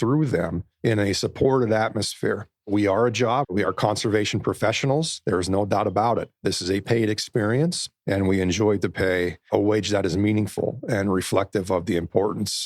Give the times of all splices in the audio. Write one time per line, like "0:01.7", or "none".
0:03.5